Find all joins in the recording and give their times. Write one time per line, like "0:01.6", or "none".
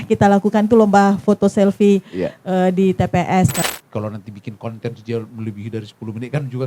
0:03.6